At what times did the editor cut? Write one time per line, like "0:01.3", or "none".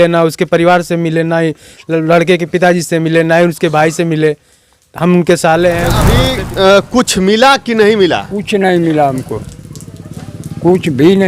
0:06.1